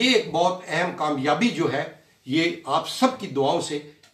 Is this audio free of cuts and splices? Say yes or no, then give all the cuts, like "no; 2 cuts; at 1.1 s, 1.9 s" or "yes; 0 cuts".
yes; 0 cuts